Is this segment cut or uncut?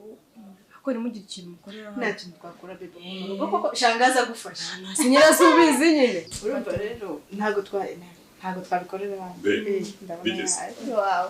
cut